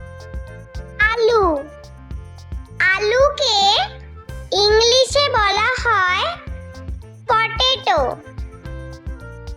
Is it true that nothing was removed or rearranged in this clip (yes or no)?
no